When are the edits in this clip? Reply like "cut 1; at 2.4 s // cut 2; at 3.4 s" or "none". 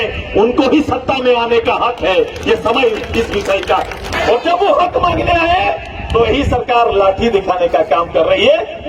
cut 1; at 4.1 s